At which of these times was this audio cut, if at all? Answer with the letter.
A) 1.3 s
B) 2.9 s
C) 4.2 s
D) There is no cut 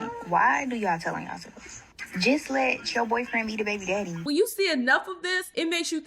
C